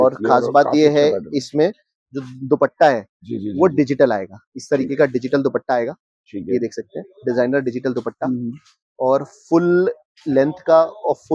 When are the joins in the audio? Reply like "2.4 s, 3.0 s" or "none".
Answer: none